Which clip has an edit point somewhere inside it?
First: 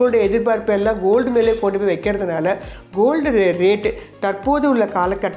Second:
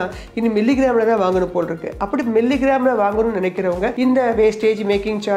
second; 1 cut; at 3.9 s

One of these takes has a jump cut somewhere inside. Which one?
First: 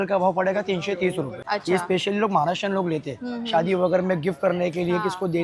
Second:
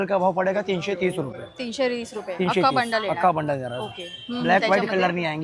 first; 1 cut; at 1.4 s

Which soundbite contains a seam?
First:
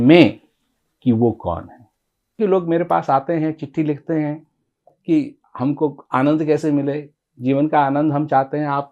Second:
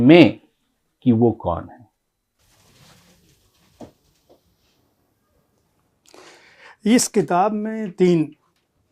first; 1 cut; at 2.4 s

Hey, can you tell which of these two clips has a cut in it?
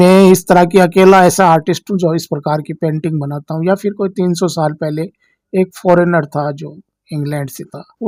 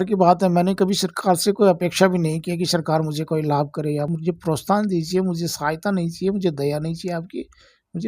second; 1 cut; at 4.1 s

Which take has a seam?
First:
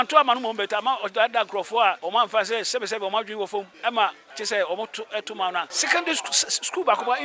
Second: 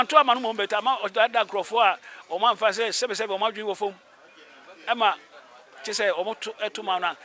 first; 4 cuts; at 2.0 s, 3.7 s, 4.3 s, 5.8 s

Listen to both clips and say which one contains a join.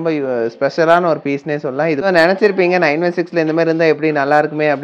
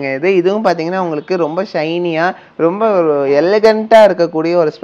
first; 1 cut; at 2.0 s

